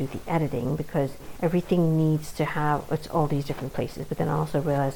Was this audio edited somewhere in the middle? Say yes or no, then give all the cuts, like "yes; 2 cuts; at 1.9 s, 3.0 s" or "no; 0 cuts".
yes; 1 cut; at 1.2 s